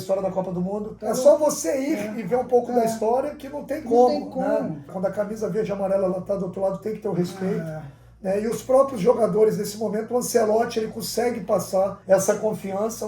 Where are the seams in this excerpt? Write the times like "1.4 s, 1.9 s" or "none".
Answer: 0.9 s, 4.9 s, 12.0 s